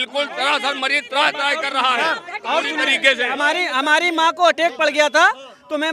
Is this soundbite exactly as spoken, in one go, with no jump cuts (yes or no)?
yes